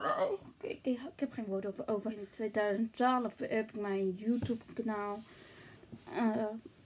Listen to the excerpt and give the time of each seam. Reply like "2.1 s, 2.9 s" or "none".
2.3 s